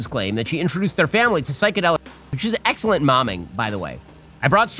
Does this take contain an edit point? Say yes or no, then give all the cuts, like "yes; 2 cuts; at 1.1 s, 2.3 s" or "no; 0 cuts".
no; 0 cuts